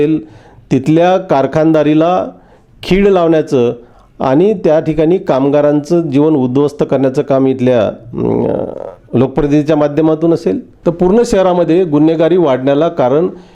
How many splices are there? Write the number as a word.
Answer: one